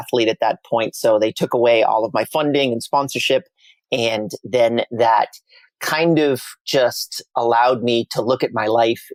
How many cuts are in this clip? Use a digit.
0